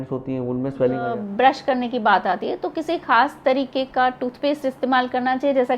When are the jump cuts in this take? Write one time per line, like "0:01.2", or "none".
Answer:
0:01.2